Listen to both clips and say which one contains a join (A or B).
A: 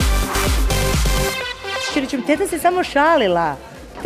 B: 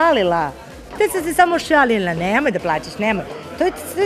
A